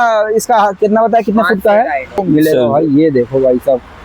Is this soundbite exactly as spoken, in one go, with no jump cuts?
no; 1 cut; at 2.1 s

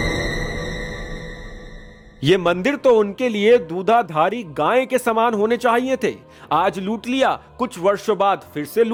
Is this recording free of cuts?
yes; 0 cuts

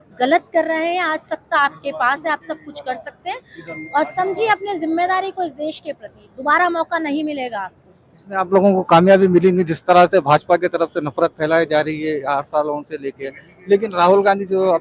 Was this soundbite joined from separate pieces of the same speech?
no; 0 cuts

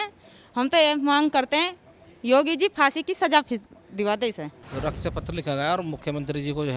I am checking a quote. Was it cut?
yes; 1 cut; at 4.6 s

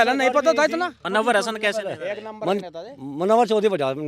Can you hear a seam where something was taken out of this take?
yes; 1 cut; at 1.0 s

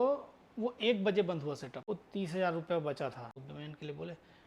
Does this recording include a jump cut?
yes; 2 cuts; at 1.7 s, 3.4 s

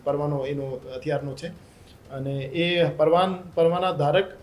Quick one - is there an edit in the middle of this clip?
no; 0 cuts

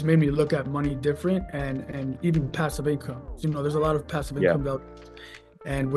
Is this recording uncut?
yes; 0 cuts

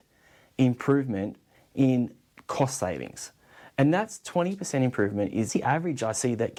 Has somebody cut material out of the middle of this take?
no; 0 cuts

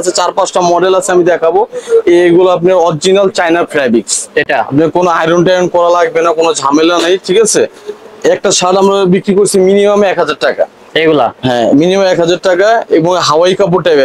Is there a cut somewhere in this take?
no; 0 cuts

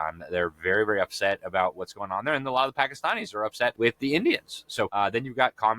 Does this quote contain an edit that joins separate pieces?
yes; 2 cuts; at 3.7 s, 4.9 s

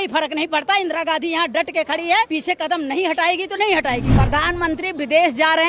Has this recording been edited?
yes; 2 cuts; at 2.3 s, 4.1 s

